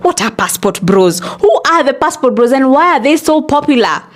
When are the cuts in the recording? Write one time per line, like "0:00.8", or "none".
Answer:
none